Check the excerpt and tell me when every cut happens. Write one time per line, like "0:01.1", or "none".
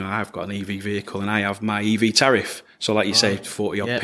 none